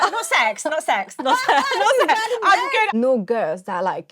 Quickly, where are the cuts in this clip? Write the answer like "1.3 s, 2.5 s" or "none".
2.9 s